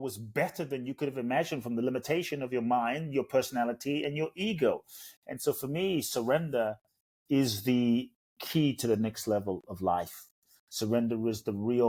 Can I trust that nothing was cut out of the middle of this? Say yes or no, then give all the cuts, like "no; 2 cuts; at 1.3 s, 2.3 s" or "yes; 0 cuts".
yes; 0 cuts